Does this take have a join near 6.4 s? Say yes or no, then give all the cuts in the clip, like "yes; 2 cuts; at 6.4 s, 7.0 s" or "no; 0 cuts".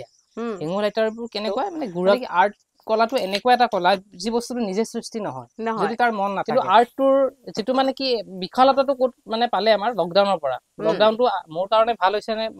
yes; 2 cuts; at 2.2 s, 6.4 s